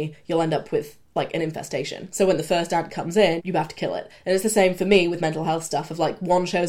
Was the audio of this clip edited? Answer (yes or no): yes